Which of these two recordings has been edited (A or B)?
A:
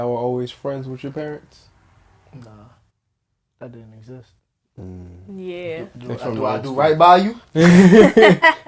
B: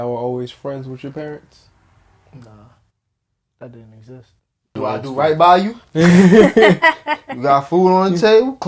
B